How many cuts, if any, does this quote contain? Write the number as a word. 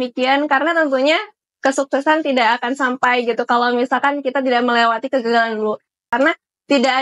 one